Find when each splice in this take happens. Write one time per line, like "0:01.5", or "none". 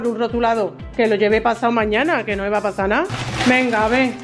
0:03.2